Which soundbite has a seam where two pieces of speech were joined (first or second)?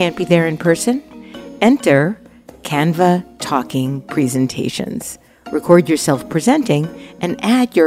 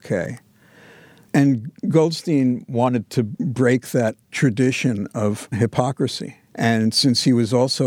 second